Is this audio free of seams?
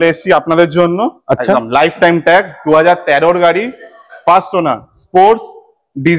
yes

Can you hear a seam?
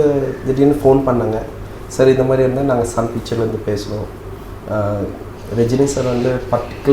no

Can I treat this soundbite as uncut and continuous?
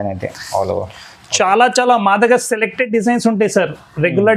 yes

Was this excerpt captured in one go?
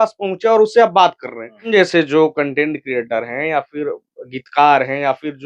no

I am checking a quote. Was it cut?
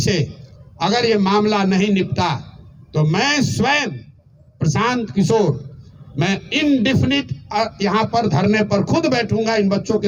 no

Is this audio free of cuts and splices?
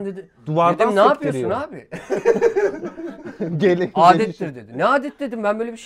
yes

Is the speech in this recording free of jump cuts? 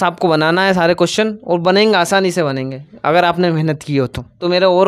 no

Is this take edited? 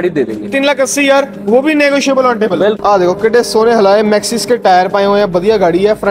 yes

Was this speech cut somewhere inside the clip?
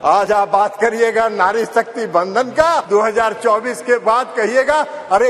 yes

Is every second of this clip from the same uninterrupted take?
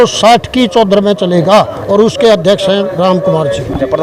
yes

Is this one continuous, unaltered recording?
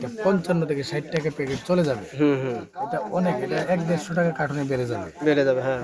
yes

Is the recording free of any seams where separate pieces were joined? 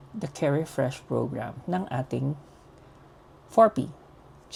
yes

